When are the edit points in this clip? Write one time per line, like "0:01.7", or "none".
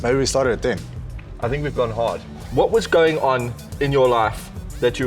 0:02.4